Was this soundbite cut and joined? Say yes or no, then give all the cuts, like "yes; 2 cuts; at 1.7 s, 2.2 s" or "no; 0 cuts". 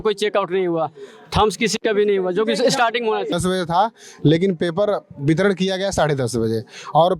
yes; 1 cut; at 3.3 s